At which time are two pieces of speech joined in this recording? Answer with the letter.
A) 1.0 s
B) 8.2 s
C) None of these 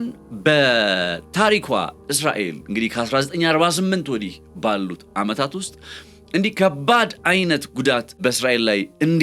B